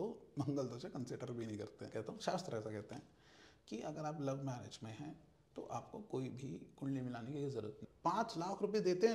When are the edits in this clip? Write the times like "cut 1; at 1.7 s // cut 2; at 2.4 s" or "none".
cut 1; at 1.9 s // cut 2; at 7.8 s